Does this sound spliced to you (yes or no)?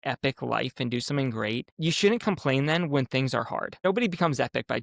yes